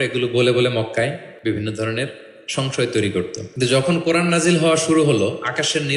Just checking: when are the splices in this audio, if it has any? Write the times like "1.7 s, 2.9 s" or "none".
1.3 s, 3.4 s